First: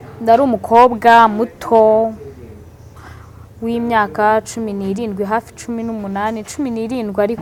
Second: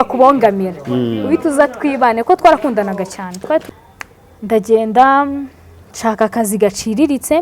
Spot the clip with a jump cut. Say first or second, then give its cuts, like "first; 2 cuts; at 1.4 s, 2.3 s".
second; 1 cut; at 3.6 s